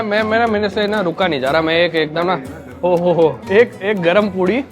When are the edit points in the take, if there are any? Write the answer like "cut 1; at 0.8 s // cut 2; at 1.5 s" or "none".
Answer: cut 1; at 3.4 s